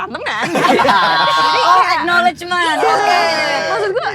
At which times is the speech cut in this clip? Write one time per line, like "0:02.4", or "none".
none